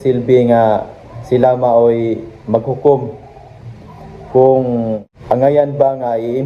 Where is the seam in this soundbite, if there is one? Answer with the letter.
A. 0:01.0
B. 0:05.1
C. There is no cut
B